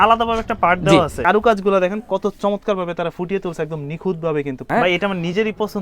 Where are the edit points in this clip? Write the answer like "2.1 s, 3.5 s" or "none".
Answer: 1.2 s, 4.6 s